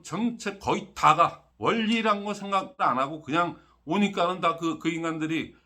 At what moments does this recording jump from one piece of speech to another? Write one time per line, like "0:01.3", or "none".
0:01.5
0:02.8